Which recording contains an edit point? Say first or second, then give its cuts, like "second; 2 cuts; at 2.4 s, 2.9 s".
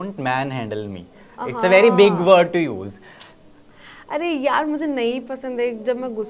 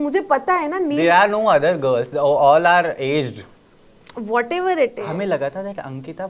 second; 1 cut; at 5.0 s